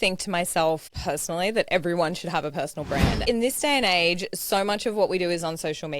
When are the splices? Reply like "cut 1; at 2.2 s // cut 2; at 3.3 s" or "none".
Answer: cut 1; at 0.9 s // cut 2; at 3.2 s